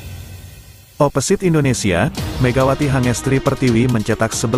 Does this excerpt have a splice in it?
yes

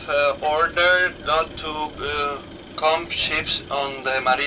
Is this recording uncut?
yes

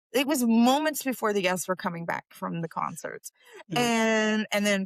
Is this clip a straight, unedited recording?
yes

